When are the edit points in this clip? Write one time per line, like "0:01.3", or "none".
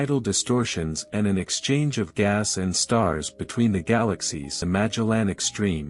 0:02.2
0:04.6